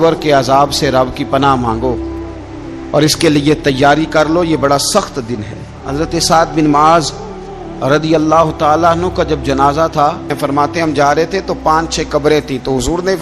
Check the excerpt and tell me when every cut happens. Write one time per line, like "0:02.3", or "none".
0:05.8
0:10.3